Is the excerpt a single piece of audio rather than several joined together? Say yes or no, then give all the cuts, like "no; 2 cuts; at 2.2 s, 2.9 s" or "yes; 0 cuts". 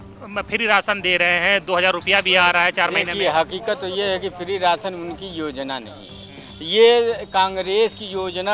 yes; 0 cuts